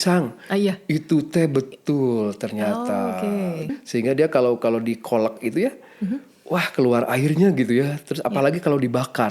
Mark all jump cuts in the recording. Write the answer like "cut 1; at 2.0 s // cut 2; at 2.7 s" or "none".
cut 1; at 3.8 s